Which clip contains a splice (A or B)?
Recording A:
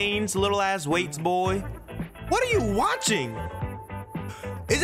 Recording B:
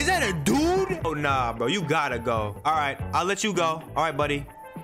B